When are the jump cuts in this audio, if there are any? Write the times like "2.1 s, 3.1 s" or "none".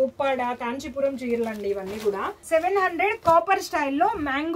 2.4 s